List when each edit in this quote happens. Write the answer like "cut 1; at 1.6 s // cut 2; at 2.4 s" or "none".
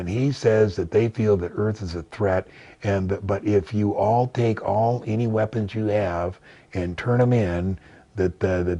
none